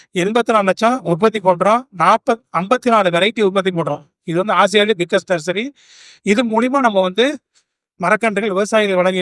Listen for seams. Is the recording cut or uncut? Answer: uncut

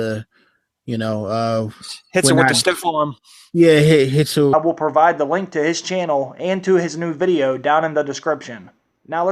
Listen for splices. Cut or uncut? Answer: uncut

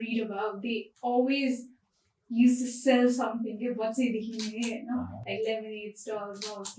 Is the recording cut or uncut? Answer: uncut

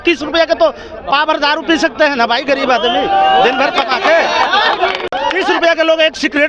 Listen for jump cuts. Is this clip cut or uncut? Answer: uncut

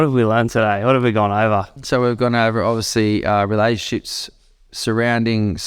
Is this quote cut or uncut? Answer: cut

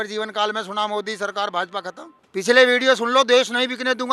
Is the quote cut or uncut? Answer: cut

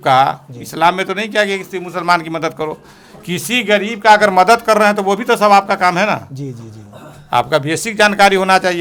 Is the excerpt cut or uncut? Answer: uncut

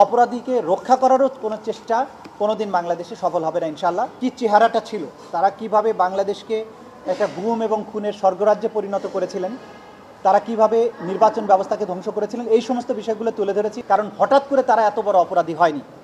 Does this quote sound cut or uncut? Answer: cut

